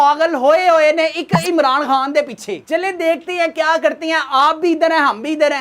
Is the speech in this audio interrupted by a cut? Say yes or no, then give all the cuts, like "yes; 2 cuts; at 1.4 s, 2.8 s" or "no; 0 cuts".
no; 0 cuts